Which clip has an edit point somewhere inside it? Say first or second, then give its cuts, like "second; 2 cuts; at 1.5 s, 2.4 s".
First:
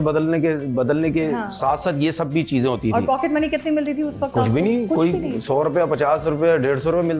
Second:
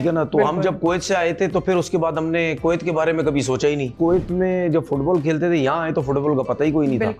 second; 1 cut; at 4.0 s